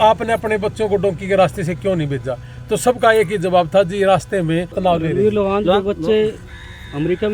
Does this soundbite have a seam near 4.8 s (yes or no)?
yes